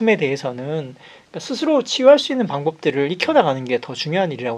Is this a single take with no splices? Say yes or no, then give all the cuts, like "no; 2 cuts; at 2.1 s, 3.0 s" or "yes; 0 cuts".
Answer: yes; 0 cuts